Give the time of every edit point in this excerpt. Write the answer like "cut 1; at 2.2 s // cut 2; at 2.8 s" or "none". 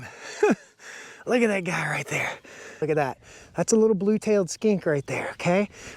cut 1; at 2.7 s